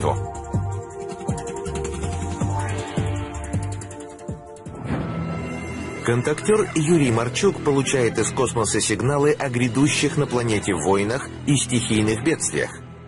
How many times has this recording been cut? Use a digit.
1